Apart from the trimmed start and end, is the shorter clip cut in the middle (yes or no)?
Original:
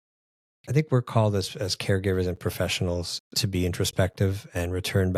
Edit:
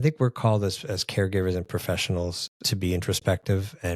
no